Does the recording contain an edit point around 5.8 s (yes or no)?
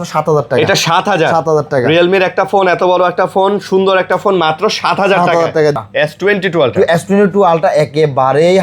yes